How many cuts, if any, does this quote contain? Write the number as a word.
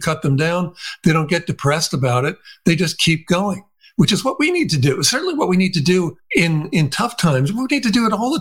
one